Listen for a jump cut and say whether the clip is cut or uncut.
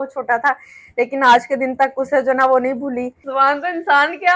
cut